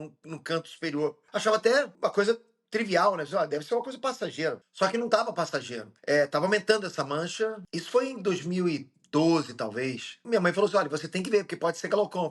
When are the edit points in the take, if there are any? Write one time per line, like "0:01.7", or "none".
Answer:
none